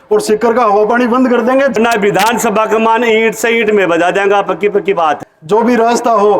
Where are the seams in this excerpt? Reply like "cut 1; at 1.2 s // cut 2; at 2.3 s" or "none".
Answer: cut 1; at 1.8 s // cut 2; at 5.3 s